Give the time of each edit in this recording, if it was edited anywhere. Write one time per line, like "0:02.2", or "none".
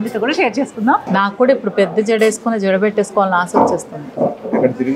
0:01.0